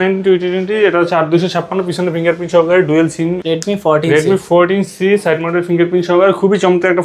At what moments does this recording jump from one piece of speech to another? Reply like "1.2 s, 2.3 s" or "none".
3.4 s